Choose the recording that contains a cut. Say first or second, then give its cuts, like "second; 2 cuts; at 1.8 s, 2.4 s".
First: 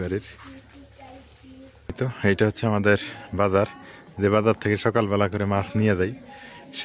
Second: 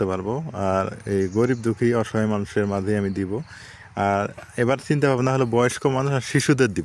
first; 1 cut; at 2.0 s